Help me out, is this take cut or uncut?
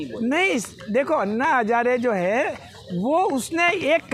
uncut